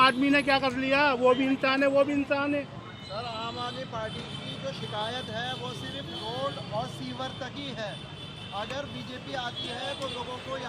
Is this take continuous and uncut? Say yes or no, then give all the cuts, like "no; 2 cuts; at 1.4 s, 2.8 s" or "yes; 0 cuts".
yes; 0 cuts